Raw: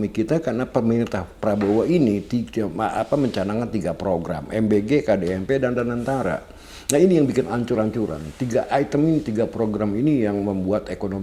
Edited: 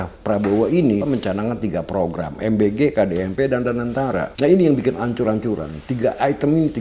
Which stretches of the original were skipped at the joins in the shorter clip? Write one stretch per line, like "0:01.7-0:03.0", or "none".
0:02.2-0:03.1
0:06.4-0:06.8